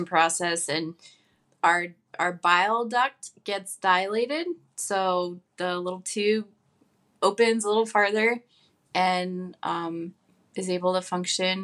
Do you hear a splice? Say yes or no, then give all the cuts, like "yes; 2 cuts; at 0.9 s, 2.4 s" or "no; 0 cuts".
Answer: no; 0 cuts